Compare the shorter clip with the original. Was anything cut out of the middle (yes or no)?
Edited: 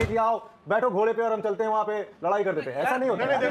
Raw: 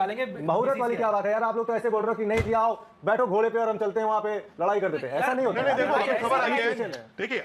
no